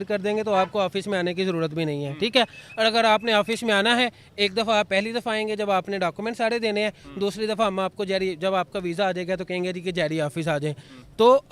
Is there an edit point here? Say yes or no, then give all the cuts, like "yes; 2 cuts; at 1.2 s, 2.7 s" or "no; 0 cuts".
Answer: no; 0 cuts